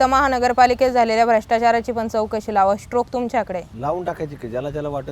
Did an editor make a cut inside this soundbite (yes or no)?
yes